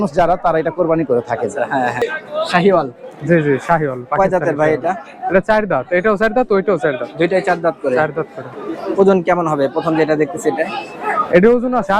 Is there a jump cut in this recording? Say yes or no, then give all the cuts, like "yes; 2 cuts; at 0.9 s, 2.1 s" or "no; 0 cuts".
yes; 1 cut; at 2.0 s